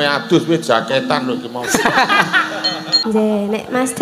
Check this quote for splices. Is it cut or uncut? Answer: cut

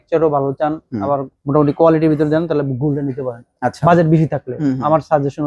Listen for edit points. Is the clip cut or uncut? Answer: uncut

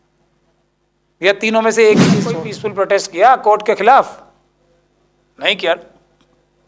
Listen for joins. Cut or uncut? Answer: cut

